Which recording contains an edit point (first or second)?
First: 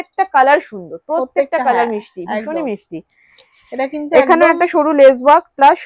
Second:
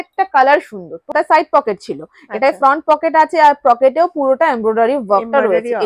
second